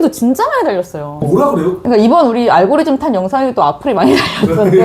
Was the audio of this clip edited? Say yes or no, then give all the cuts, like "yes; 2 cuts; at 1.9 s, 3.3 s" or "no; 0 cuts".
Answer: no; 0 cuts